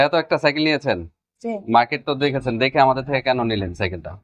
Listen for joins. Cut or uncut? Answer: uncut